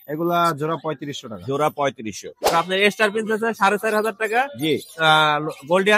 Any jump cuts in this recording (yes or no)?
yes